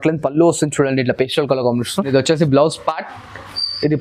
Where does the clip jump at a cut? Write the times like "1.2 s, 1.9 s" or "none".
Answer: 2.1 s